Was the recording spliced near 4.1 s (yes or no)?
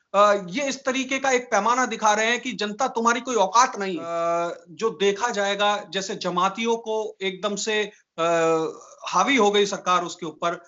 yes